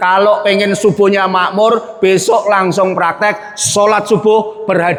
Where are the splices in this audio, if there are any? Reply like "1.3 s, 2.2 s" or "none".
none

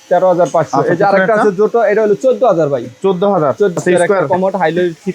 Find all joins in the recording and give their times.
3.7 s

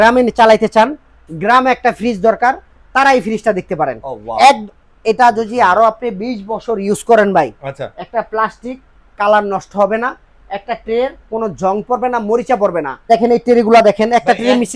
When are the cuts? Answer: 13.1 s

